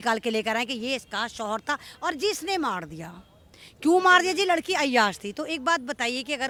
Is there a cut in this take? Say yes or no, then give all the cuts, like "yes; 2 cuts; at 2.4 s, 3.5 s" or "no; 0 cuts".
no; 0 cuts